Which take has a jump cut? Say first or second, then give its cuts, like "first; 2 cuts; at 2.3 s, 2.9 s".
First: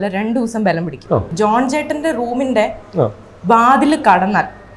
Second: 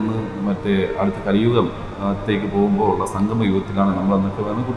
first; 1 cut; at 1.3 s